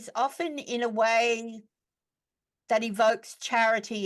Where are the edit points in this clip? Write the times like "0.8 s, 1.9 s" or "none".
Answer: none